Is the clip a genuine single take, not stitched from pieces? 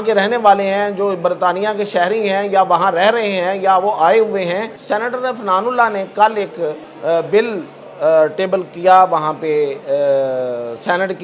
no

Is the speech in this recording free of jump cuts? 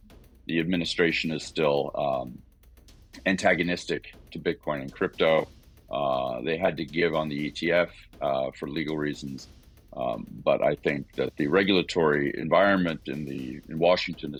yes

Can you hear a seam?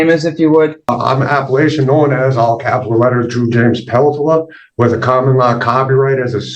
yes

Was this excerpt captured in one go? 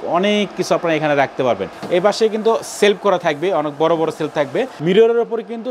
no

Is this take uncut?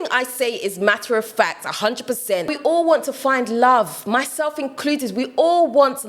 no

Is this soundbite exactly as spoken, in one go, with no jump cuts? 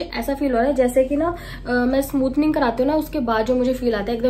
yes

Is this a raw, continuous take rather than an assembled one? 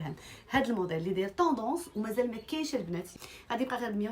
no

